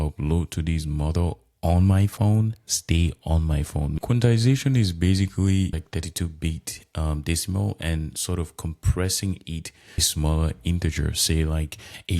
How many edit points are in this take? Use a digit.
3